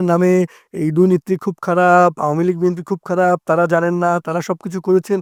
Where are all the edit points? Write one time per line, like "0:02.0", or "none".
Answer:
none